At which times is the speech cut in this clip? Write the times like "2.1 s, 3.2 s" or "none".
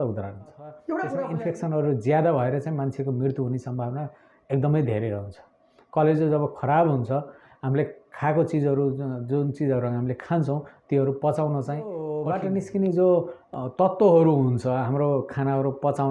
1.2 s, 12.1 s